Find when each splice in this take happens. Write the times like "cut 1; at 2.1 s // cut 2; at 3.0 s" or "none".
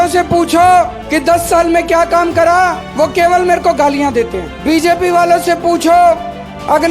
cut 1; at 1.0 s // cut 2; at 2.8 s // cut 3; at 4.5 s